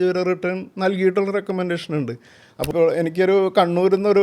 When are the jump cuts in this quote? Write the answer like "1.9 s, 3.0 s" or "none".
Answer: 2.7 s